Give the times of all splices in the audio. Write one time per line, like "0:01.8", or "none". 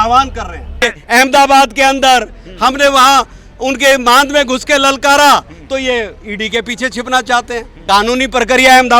0:00.8
0:07.8